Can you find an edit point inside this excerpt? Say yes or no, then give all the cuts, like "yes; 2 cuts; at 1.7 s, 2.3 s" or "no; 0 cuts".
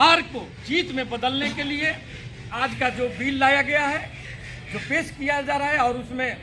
yes; 1 cut; at 2.5 s